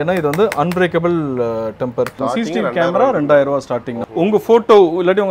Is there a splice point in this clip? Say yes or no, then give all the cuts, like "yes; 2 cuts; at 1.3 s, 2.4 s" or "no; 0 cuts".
yes; 2 cuts; at 2.1 s, 4.0 s